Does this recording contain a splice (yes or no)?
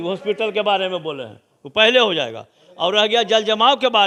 no